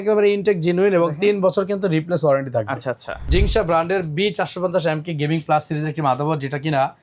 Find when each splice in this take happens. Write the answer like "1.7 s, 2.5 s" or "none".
3.2 s

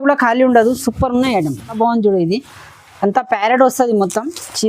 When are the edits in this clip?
1.8 s

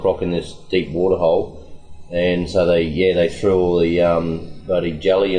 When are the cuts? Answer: 4.5 s

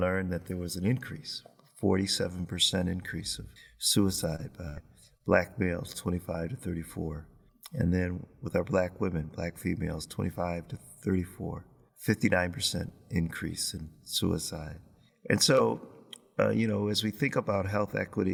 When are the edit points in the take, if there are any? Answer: none

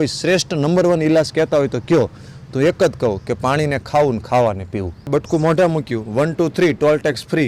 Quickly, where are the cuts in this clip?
5.1 s

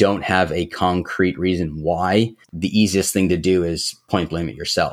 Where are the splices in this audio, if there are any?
2.5 s

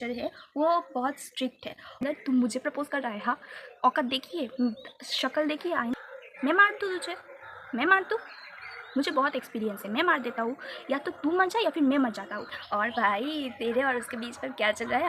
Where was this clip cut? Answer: 2.0 s, 5.9 s, 12.4 s

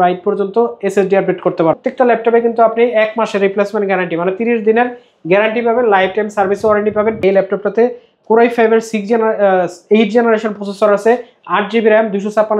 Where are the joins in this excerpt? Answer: 1.8 s, 7.2 s

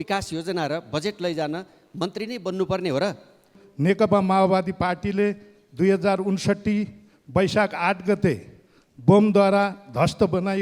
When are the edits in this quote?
3.6 s

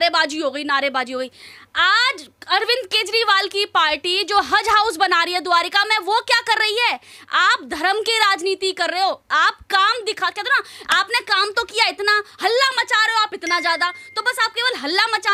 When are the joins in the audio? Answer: none

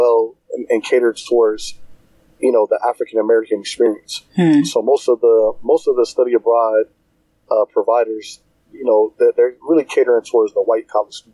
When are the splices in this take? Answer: none

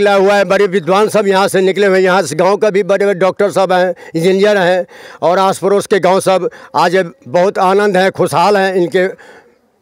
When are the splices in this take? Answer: none

